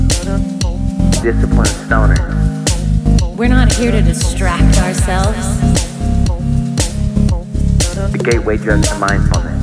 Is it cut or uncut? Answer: cut